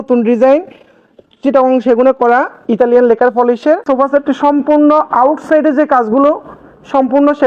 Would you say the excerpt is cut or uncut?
cut